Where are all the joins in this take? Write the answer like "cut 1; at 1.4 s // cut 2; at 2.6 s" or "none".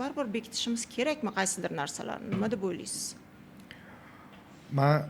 none